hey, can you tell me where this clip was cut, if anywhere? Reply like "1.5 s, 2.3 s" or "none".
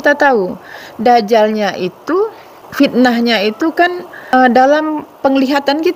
2.5 s, 4.3 s